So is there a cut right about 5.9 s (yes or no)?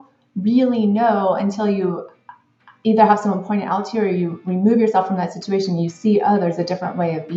no